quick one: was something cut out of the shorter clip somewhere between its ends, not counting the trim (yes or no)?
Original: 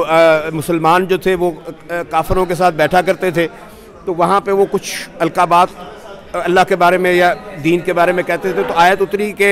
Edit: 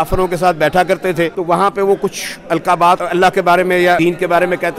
yes